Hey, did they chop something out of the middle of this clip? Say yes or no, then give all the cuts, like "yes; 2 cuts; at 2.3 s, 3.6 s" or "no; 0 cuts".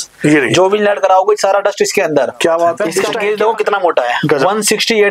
yes; 1 cut; at 3.1 s